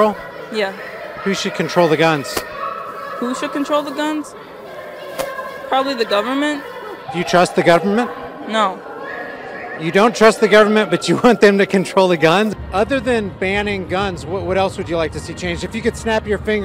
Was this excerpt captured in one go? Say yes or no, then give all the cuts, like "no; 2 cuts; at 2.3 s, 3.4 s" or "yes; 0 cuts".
yes; 0 cuts